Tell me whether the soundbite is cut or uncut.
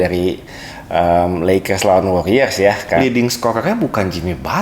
cut